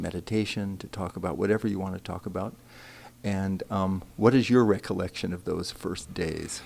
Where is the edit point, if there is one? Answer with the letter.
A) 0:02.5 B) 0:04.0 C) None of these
A